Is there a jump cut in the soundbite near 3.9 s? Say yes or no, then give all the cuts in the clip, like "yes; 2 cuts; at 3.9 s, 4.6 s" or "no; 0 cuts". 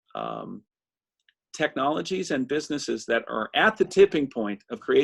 no; 0 cuts